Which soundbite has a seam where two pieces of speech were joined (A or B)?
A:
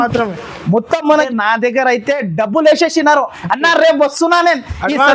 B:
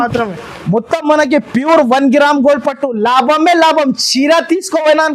A